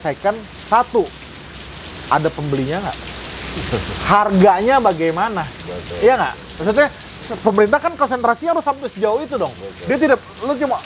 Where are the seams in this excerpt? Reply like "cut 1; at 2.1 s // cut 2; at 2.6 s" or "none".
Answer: none